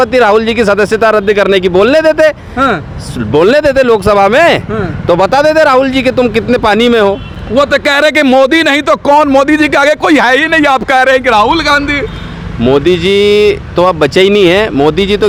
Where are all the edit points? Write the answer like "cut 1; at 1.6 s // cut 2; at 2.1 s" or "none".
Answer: none